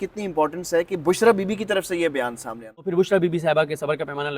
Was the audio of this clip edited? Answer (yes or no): yes